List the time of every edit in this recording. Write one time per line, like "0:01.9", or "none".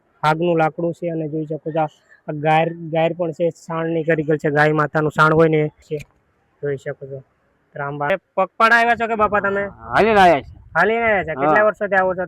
0:05.9
0:08.1